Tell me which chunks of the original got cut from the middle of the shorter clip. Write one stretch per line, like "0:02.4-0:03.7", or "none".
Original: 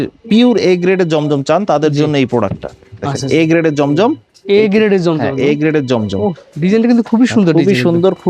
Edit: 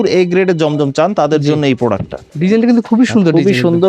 0:02.8-0:06.5